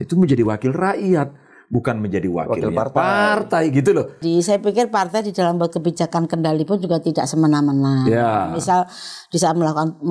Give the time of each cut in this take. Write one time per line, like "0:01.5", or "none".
0:04.2

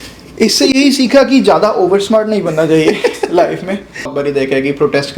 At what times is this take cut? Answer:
0:04.1

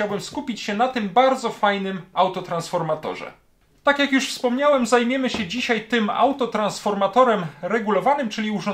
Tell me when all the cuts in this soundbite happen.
none

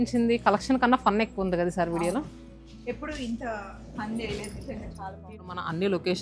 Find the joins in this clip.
0:05.3

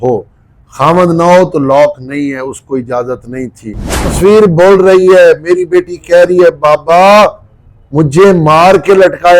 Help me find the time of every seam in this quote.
0:04.1

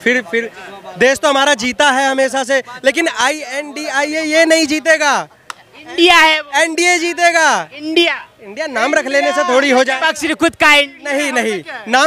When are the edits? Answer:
none

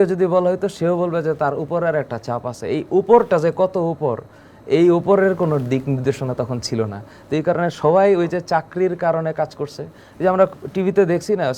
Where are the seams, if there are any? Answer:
none

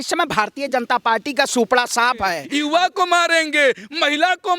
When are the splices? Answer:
0:02.4

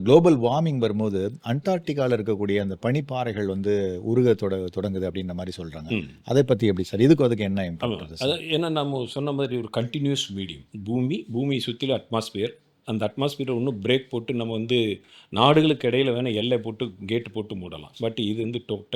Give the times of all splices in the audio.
none

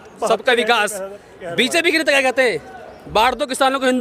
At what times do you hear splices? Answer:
none

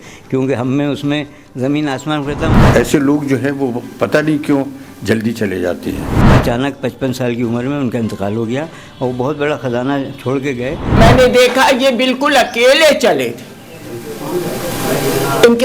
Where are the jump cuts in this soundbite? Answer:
0:02.5
0:06.2
0:11.0

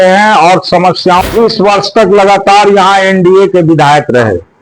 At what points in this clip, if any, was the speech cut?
0:01.2

